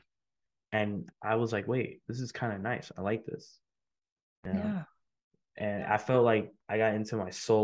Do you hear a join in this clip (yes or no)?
yes